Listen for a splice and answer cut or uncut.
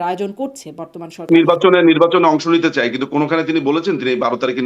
cut